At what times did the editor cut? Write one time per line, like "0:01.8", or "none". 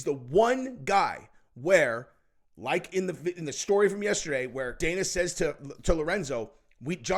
0:04.8